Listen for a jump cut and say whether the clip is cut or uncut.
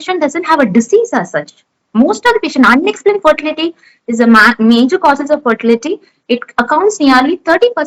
uncut